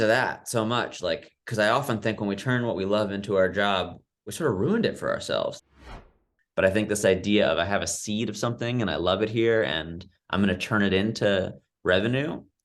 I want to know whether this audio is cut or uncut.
cut